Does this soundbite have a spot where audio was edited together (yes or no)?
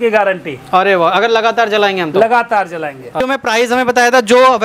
yes